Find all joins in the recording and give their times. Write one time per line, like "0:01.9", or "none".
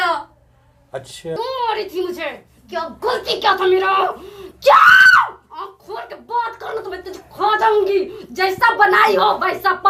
0:01.4